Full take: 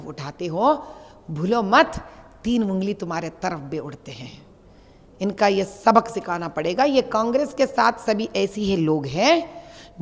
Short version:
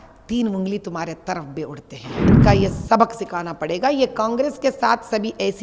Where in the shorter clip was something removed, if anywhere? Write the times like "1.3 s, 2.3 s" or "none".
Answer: 2.2 s

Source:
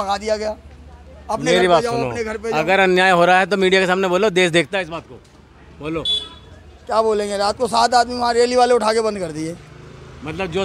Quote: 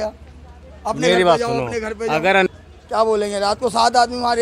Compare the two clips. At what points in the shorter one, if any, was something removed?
2.5 s

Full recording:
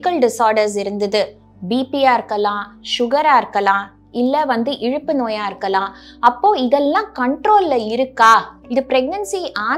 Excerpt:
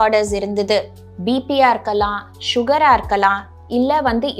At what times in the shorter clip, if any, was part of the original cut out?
none

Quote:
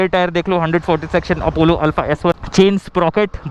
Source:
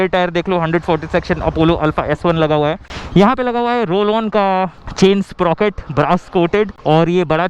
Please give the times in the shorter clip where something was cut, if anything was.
2.4 s

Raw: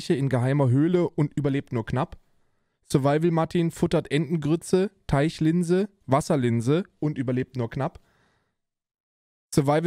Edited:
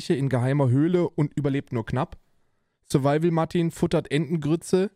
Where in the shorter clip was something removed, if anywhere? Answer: none

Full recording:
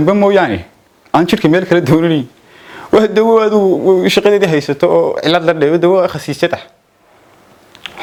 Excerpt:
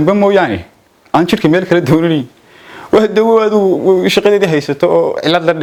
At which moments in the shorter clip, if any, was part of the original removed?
none

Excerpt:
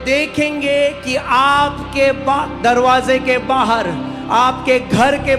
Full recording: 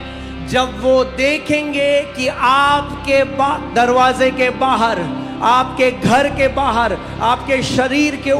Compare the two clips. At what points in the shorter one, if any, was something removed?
none

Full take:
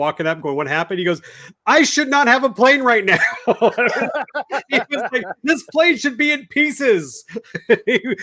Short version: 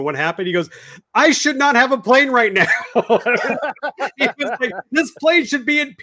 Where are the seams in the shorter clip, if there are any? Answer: none

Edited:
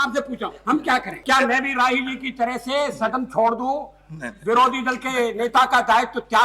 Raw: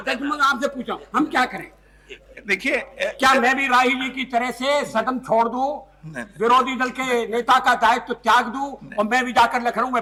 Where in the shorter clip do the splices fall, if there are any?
1.2 s

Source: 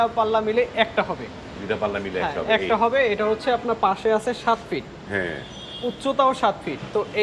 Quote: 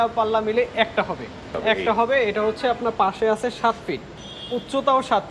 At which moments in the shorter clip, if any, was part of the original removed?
1.5 s, 4.2 s

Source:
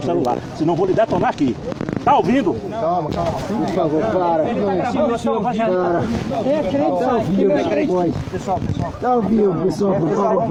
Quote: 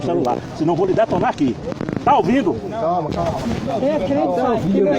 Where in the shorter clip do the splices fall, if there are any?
3.4 s

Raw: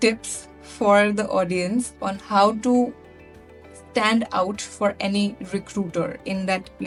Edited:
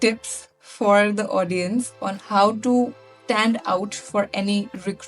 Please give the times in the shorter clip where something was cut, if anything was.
3.1 s

